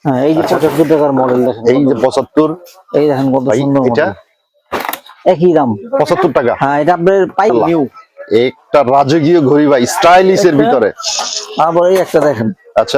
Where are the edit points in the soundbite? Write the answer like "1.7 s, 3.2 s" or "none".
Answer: 7.5 s